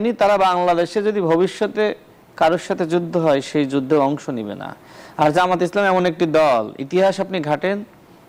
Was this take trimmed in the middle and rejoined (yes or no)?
no